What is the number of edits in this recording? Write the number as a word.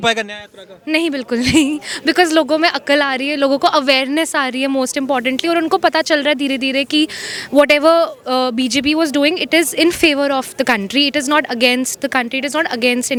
zero